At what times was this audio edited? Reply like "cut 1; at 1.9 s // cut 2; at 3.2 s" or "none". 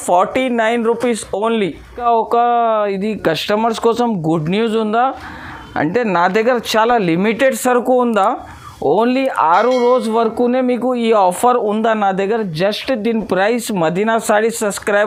none